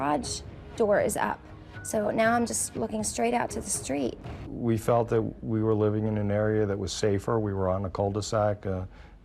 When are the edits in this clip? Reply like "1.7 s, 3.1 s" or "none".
4.4 s